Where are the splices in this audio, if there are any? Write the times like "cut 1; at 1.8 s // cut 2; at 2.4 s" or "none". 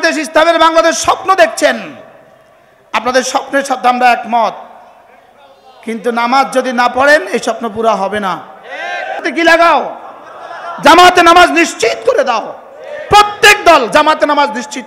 cut 1; at 9.2 s